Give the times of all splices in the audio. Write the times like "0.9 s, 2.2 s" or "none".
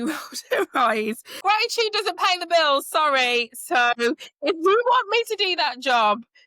1.4 s